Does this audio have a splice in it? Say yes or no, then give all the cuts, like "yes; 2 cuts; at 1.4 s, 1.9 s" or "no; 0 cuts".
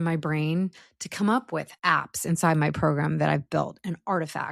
yes; 1 cut; at 1.7 s